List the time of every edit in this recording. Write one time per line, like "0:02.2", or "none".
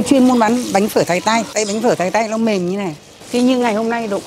0:01.5
0:03.3